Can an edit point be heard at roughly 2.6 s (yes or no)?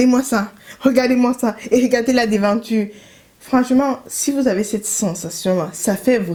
no